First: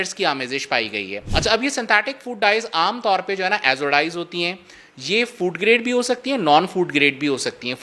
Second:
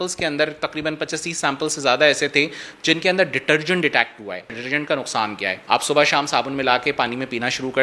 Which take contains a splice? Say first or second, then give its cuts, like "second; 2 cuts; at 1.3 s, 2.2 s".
second; 1 cut; at 4.5 s